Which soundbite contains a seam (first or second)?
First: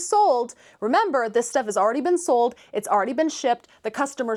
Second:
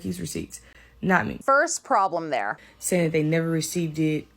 second